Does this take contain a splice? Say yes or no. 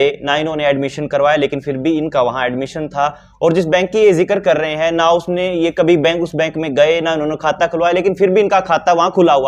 no